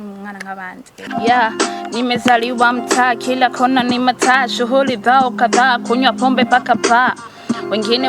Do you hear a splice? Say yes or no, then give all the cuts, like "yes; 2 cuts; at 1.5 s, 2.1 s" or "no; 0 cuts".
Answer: yes; 1 cut; at 1.0 s